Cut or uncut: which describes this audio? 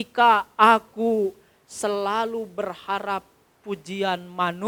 uncut